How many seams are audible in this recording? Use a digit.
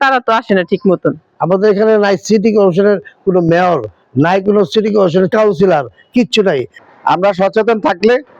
2